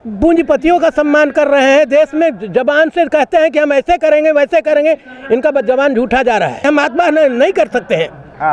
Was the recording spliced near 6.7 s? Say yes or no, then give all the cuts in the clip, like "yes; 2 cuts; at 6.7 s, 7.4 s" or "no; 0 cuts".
yes; 1 cut; at 6.7 s